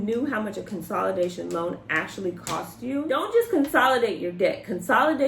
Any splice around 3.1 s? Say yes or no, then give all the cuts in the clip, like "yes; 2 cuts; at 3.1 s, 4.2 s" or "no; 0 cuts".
yes; 1 cut; at 3.1 s